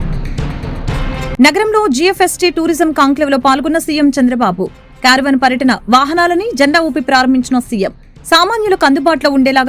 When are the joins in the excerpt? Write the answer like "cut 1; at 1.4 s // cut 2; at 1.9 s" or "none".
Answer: cut 1; at 1.1 s